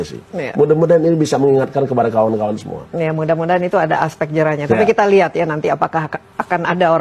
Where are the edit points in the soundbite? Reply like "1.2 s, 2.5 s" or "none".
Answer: none